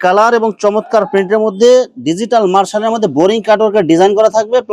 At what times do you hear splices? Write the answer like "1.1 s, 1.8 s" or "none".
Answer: none